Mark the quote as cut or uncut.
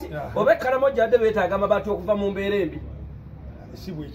uncut